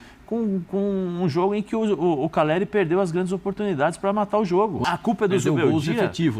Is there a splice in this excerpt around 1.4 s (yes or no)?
no